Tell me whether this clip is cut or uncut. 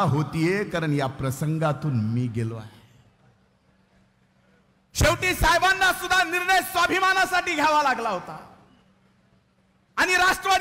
uncut